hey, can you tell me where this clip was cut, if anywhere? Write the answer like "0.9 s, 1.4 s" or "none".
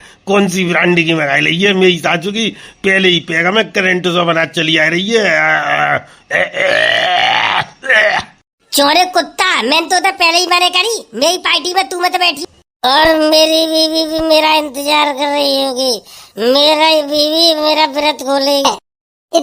12.4 s, 18.6 s